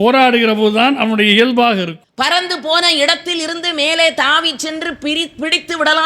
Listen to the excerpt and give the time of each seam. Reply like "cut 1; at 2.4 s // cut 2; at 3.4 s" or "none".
cut 1; at 2.0 s